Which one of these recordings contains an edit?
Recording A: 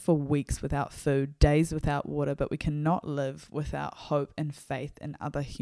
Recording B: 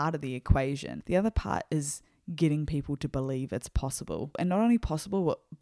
B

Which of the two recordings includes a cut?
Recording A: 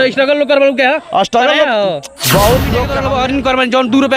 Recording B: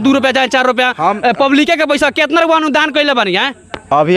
A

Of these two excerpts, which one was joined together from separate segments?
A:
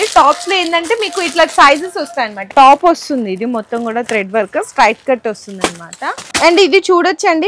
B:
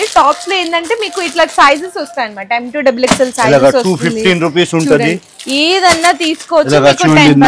A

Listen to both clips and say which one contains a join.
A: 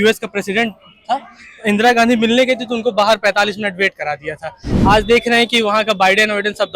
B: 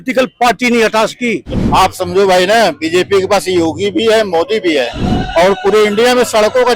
B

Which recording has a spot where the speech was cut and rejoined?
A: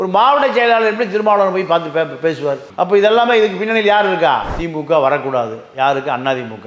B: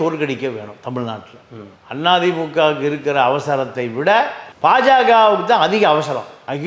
A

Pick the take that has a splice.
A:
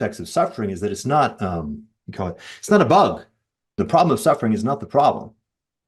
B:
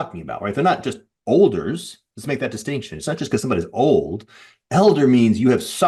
A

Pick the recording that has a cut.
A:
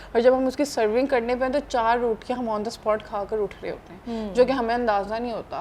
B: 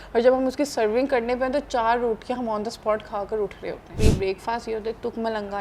B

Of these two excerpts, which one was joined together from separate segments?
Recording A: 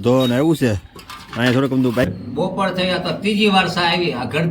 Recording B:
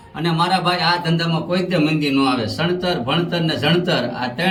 A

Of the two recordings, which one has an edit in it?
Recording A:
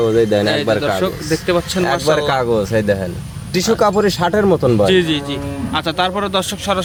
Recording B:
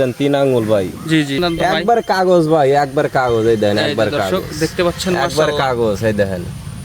B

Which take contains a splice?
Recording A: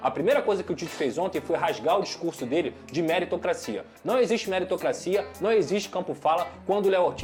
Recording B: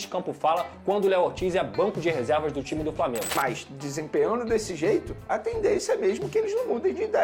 B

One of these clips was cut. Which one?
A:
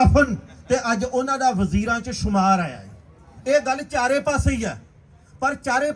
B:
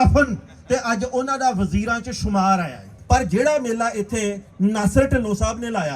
B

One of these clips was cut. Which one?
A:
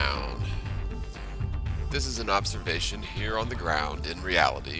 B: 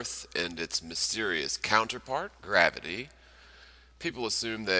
A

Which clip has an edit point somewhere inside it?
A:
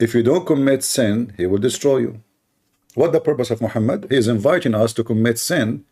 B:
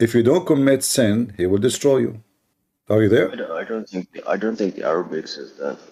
A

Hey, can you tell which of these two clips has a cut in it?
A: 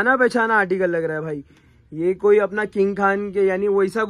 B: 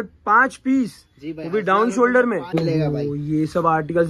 B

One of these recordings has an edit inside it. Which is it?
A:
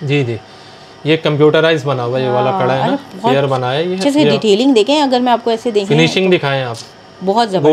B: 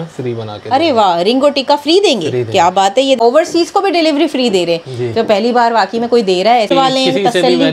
B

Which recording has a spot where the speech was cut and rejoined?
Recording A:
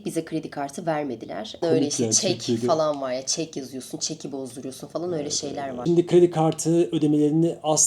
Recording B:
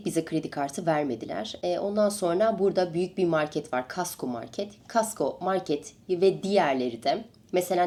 A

